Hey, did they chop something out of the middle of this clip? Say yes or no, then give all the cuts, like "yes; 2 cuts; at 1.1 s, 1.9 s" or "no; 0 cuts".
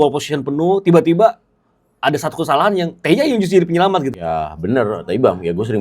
yes; 1 cut; at 4.1 s